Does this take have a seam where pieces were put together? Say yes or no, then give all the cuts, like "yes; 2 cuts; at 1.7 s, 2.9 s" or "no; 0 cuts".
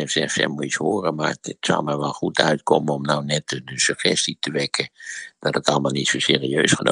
no; 0 cuts